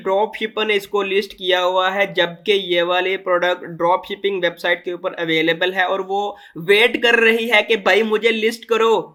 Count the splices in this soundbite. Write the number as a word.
zero